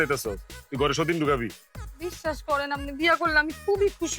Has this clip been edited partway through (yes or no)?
no